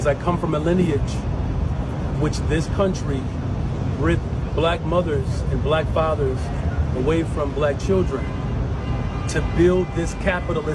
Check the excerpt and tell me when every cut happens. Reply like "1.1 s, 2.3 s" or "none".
none